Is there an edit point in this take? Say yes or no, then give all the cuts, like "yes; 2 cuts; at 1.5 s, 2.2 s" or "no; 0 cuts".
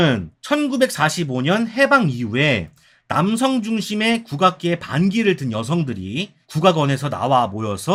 no; 0 cuts